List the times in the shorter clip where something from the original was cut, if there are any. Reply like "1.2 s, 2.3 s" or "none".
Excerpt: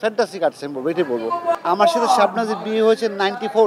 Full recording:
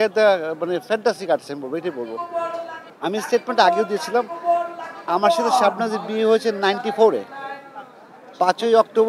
1.6 s